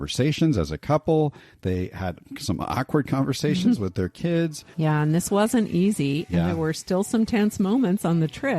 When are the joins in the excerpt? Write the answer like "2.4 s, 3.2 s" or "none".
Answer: 4.6 s